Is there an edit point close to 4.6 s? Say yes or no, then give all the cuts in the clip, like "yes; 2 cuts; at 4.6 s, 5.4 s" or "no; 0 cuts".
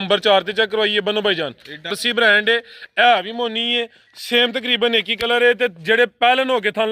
no; 1 cut; at 2.0 s